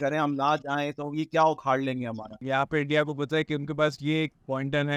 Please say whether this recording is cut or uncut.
cut